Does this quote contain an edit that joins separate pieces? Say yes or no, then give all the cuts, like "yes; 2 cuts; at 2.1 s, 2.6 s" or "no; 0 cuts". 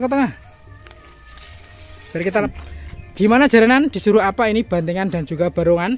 yes; 1 cut; at 2.5 s